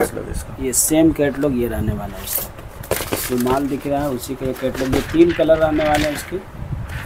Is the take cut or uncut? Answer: uncut